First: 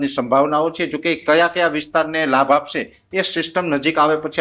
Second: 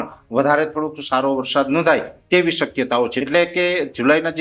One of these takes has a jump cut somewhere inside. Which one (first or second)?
second